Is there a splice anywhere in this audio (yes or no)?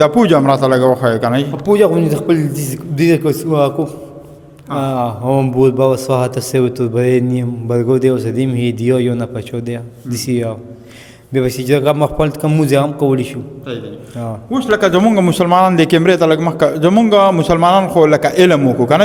no